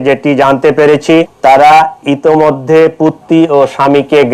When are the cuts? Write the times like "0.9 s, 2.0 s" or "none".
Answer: 1.3 s